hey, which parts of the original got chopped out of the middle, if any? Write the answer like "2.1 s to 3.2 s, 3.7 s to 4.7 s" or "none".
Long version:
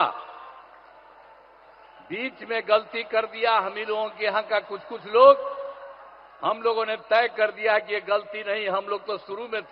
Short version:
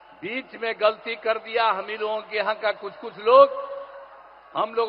none